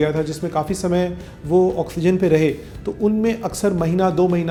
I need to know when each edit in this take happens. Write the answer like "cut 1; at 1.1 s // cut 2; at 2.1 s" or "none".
none